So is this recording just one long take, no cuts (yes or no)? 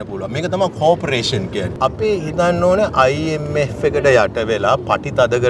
no